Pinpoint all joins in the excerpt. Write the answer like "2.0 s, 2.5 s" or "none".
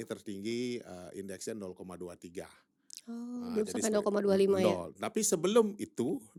none